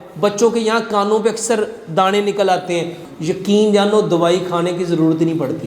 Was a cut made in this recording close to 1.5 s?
no; 1 cut; at 3.0 s

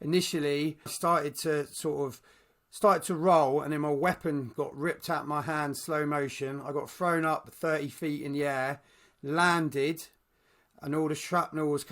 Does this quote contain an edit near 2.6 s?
no; 1 cut; at 0.9 s

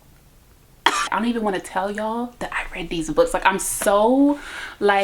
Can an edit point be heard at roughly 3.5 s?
no; 1 cut; at 1.1 s

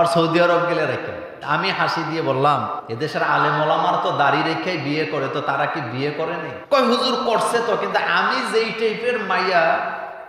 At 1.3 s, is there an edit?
yes; 2 cuts; at 1.3 s, 2.7 s

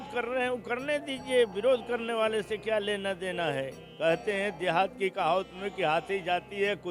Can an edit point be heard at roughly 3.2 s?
no; 0 cuts

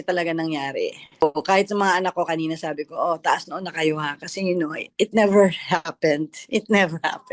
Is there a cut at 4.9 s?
no; 1 cut; at 1.2 s

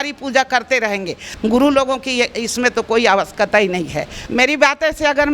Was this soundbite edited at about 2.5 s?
no; 2 cuts; at 1.2 s, 4.2 s

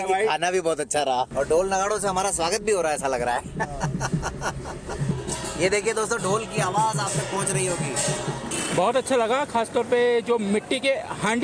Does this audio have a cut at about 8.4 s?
yes; 2 cuts; at 1.3 s, 8.4 s

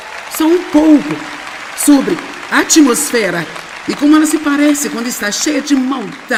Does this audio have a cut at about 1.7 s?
no; 0 cuts

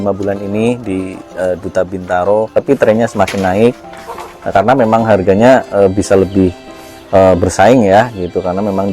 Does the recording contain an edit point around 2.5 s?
yes; 1 cut; at 2.5 s

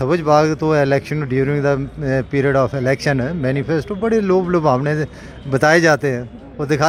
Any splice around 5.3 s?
no; 0 cuts

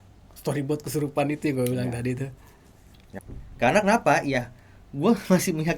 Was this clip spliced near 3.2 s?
yes; 1 cut; at 3.2 s

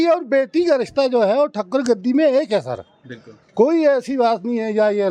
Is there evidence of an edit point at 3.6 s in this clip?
no; 0 cuts

